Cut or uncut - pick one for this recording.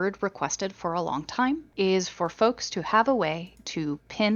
uncut